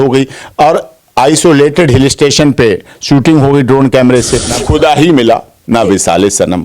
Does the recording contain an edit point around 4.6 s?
yes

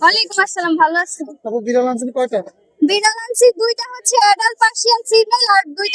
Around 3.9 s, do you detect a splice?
no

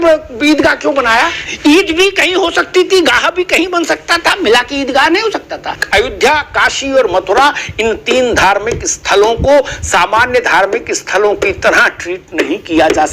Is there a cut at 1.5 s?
yes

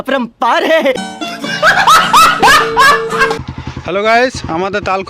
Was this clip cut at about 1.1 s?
yes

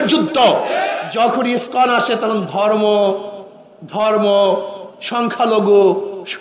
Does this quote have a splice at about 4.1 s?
no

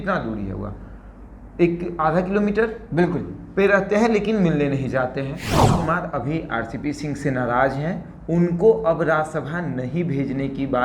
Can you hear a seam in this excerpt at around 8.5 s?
no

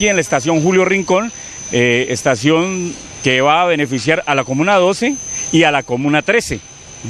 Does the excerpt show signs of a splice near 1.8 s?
no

